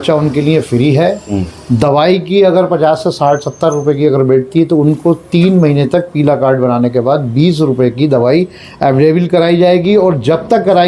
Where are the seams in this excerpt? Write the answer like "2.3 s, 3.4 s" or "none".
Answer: none